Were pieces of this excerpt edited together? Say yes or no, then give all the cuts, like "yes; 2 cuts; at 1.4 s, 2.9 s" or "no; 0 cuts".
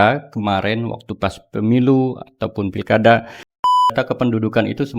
yes; 1 cut; at 3.7 s